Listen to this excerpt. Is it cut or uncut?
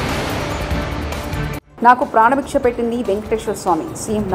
cut